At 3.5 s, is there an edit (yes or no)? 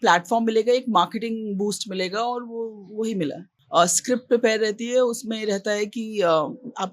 yes